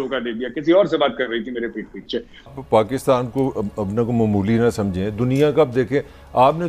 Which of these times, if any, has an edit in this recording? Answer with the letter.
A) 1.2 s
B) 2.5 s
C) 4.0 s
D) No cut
B